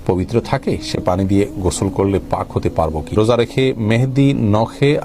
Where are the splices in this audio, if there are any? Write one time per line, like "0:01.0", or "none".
0:03.1